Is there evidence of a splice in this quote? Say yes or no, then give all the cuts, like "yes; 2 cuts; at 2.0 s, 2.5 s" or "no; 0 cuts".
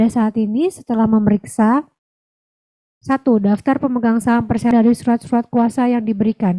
yes; 1 cut; at 4.7 s